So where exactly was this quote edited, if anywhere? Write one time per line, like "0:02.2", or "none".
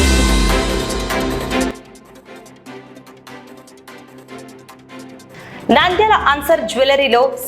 0:01.7
0:03.9
0:04.9

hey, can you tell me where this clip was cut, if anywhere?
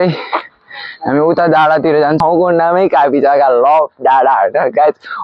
0:02.2

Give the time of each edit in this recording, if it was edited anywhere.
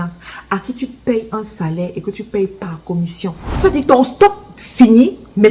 0:03.4

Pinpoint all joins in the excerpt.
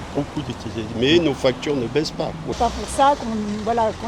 0:02.5

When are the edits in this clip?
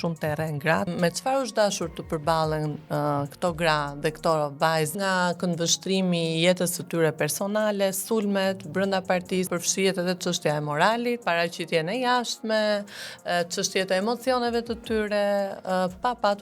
0:00.9
0:04.9
0:09.5
0:11.2

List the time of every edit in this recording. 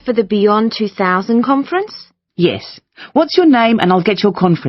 none

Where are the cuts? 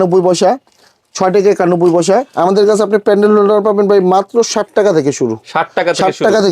0:02.3

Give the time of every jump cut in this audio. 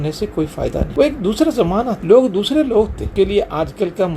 0:00.9
0:02.0
0:03.0

